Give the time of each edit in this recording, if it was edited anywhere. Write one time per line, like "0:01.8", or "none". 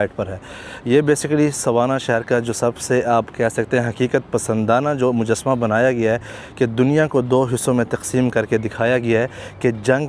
none